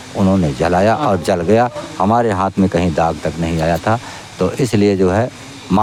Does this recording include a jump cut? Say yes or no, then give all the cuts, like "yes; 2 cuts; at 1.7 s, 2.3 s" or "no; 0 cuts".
no; 0 cuts